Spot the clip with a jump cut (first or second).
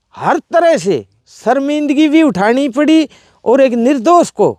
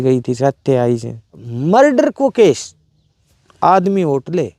second